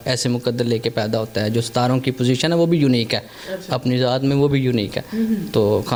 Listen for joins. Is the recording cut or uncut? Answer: uncut